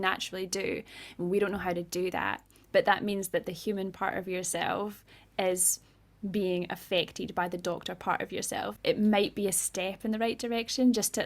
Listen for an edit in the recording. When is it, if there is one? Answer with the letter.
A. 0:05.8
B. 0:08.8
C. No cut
B